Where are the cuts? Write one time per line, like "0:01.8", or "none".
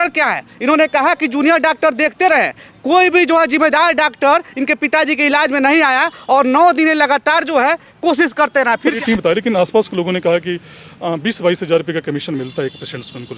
0:09.0